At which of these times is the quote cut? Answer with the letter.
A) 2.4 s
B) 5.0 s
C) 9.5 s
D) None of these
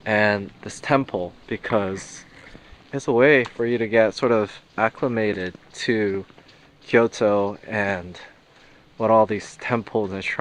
D